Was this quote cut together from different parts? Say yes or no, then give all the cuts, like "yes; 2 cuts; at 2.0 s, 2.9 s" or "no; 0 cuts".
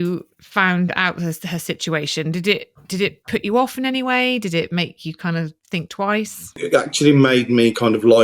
yes; 1 cut; at 6.6 s